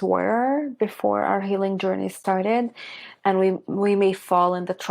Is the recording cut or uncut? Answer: uncut